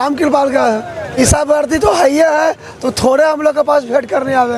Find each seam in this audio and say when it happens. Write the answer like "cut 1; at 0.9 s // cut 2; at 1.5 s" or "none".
cut 1; at 1.2 s